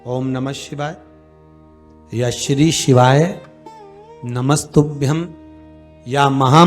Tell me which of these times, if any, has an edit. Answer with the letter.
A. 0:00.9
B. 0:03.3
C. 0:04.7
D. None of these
D